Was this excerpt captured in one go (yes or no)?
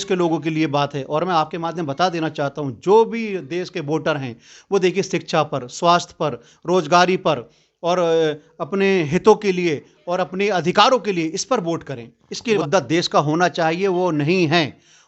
no